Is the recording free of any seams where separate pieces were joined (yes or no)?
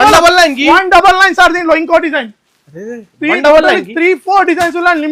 yes